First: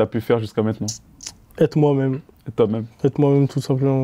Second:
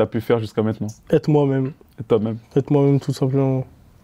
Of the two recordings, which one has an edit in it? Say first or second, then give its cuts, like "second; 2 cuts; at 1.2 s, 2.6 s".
second; 1 cut; at 0.9 s